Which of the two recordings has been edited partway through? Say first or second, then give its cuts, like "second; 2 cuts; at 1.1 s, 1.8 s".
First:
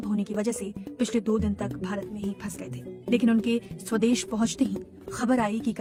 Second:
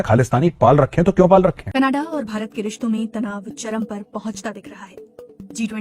second; 1 cut; at 1.6 s